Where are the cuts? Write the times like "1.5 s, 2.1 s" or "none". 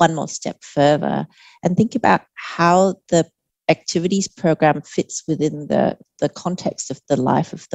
none